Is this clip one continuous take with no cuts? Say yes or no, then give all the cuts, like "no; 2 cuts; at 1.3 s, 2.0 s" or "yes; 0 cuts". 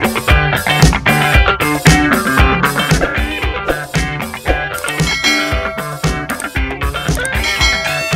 yes; 0 cuts